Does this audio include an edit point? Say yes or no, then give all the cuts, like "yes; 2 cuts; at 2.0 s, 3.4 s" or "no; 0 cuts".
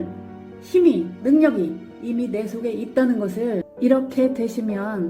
yes; 1 cut; at 3.7 s